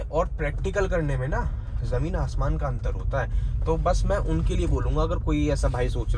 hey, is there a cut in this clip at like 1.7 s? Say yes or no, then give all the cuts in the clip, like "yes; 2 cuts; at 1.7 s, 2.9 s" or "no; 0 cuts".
no; 0 cuts